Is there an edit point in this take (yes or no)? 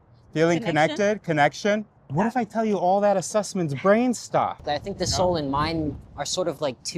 yes